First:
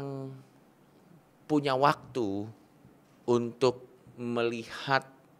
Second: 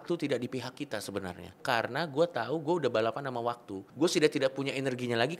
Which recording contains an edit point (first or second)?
second